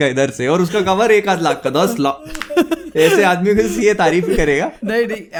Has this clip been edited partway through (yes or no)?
no